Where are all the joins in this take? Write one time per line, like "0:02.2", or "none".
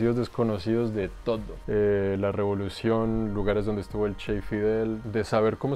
0:01.6
0:05.0